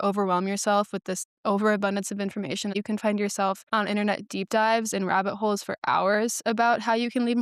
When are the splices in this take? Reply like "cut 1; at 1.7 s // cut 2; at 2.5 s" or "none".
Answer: cut 1; at 1.2 s // cut 2; at 2.8 s